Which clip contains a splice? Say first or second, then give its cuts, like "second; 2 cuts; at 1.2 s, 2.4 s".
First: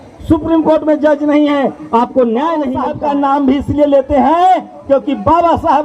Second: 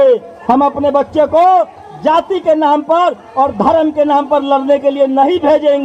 first; 1 cut; at 2.8 s